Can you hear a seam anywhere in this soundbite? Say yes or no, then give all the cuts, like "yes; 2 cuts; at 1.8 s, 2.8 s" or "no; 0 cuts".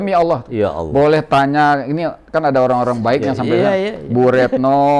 no; 0 cuts